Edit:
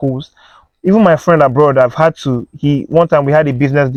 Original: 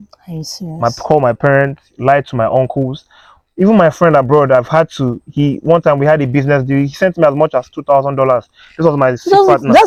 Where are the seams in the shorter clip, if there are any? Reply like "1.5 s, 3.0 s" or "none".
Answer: none

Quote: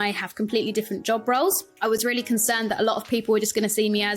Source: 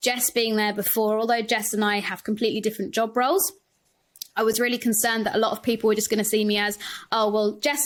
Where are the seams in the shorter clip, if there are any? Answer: 1.7 s

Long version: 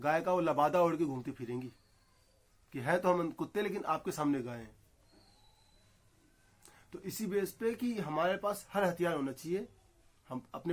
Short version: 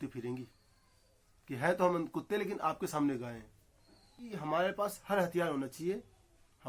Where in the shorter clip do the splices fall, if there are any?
4.4 s

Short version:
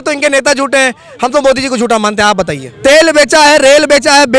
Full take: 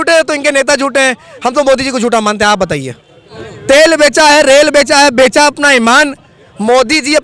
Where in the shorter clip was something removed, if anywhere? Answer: 2.6 s

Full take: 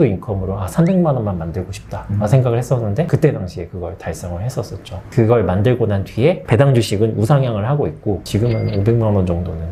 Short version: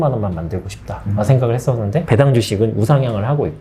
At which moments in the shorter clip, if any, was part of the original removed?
2.0 s

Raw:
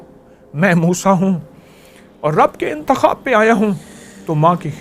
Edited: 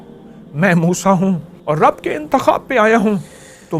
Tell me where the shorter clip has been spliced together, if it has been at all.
1.5 s

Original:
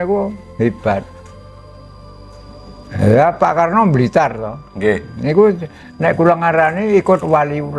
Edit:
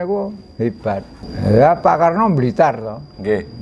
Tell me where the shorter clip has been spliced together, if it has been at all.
1.2 s

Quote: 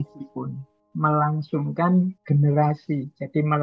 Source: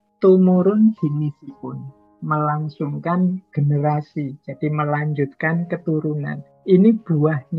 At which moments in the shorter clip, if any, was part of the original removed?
none

